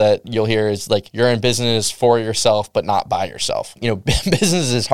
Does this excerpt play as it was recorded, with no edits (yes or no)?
no